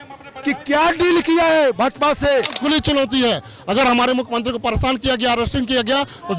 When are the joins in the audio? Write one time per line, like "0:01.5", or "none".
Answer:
0:02.6

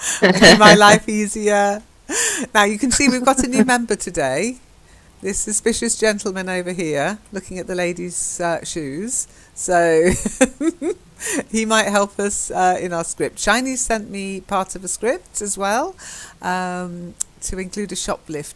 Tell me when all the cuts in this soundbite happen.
none

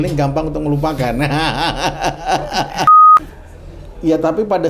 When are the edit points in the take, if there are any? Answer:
0:03.1

